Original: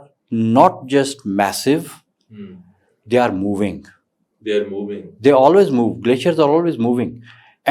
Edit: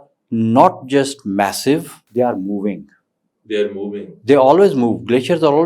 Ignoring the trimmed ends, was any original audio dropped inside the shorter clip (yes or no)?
yes